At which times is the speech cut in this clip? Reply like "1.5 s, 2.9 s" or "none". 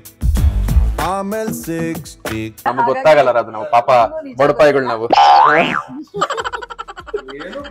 2.6 s